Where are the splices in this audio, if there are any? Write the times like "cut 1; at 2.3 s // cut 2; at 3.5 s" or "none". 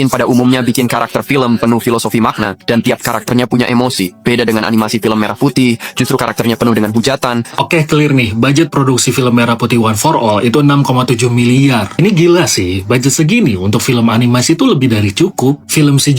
cut 1; at 7.6 s